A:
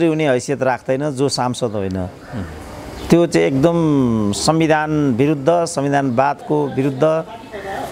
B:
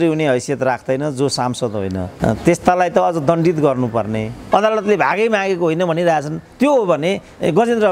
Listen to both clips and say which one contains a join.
B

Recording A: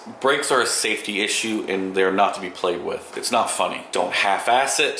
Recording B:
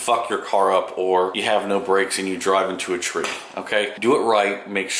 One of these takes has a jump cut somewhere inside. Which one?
B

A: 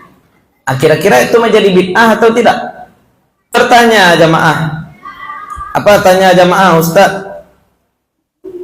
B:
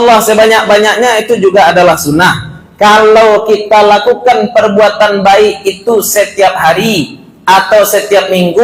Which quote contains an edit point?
A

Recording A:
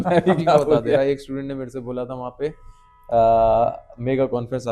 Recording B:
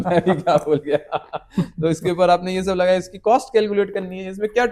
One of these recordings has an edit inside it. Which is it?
A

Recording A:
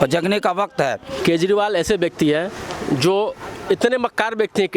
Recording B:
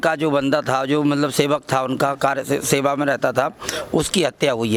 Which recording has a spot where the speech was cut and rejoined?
A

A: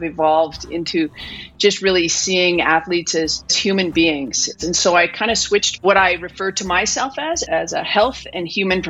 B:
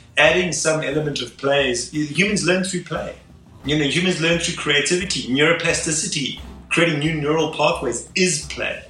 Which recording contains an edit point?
A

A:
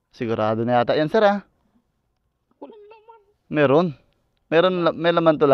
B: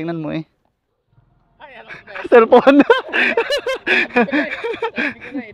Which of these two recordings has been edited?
B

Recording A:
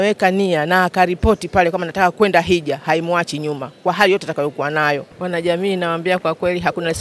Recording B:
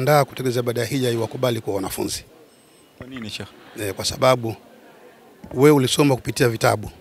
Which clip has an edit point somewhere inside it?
A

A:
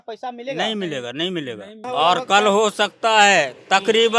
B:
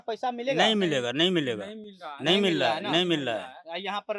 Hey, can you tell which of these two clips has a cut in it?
A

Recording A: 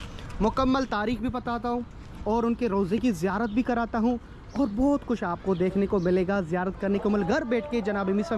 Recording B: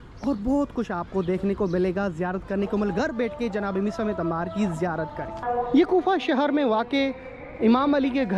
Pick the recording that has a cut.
B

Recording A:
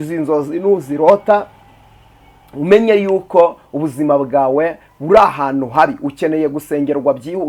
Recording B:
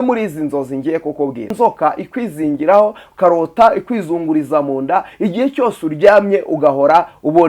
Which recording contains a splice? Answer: B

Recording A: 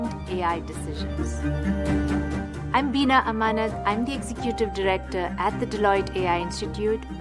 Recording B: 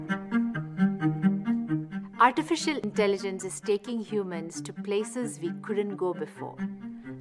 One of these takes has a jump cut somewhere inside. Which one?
B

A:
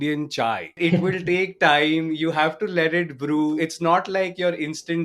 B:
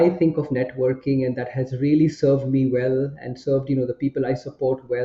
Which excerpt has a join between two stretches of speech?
A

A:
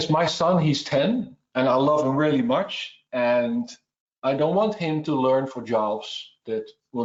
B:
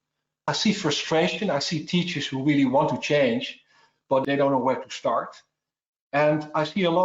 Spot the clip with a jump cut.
B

